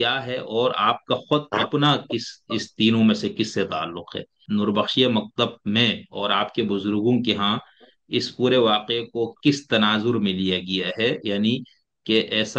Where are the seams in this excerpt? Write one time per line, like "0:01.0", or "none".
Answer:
0:04.4

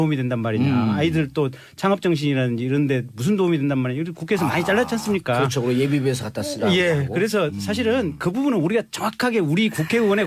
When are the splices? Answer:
0:02.7

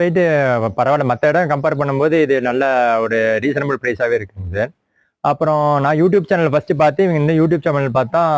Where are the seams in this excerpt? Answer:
none

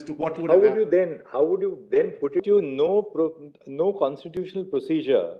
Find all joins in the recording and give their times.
0:02.4

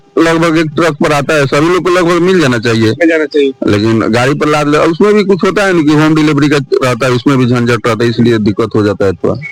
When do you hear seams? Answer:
none

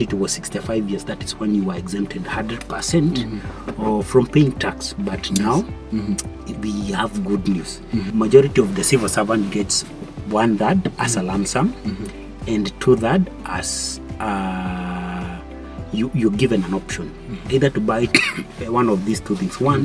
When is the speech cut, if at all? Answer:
0:08.1

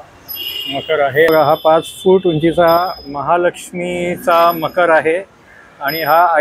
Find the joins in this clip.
0:01.3

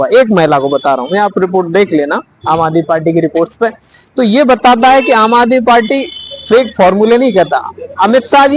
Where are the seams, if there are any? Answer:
none

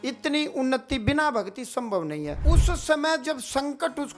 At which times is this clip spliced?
0:02.4

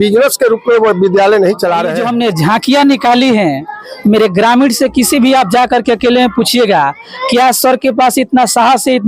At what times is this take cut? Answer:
0:02.0

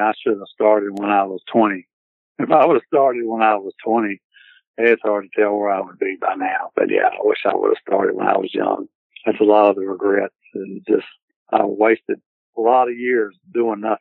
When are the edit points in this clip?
none

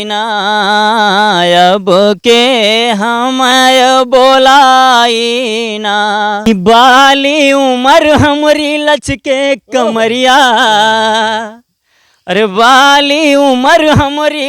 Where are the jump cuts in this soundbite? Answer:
0:06.5

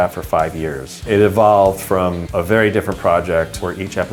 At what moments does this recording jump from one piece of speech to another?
0:00.9

